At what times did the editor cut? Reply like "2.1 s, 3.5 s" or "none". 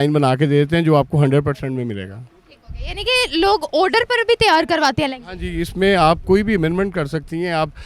none